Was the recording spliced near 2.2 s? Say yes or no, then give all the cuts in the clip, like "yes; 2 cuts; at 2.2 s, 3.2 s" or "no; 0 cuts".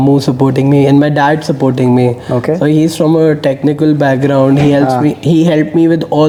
no; 0 cuts